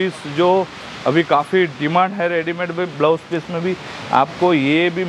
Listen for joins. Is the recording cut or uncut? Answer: uncut